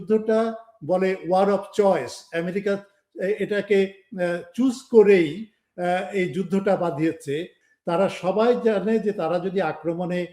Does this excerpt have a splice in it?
yes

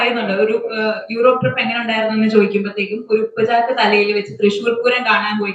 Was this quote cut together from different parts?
no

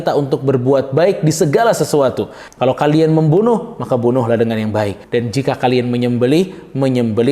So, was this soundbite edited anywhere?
yes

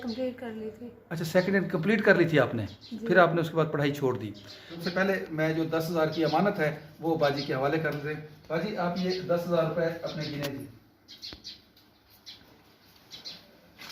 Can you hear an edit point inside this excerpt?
yes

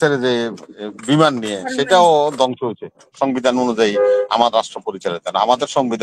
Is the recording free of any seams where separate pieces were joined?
no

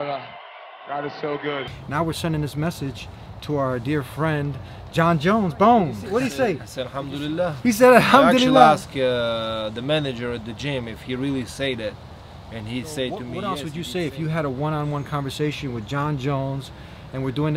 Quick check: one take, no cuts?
no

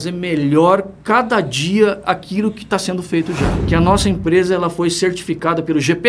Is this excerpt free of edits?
no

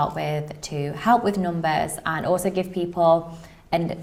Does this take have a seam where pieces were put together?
no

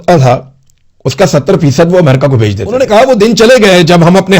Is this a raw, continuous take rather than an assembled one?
no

